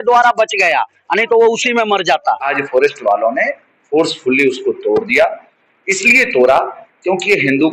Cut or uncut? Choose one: cut